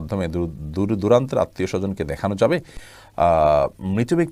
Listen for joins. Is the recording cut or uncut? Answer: uncut